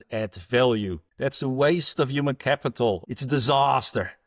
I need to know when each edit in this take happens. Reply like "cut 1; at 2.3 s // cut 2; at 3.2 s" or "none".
cut 1; at 1.0 s // cut 2; at 3.1 s